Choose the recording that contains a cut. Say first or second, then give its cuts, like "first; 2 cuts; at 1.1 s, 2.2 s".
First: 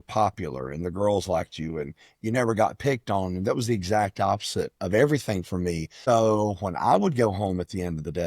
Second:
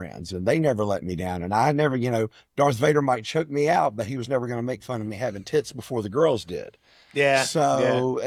first; 1 cut; at 5.9 s